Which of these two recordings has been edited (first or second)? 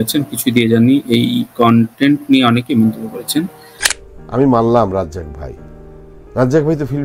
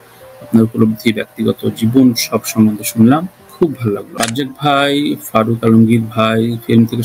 second